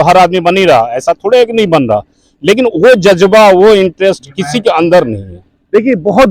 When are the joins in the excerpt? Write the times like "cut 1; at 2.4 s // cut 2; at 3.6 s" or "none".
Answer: none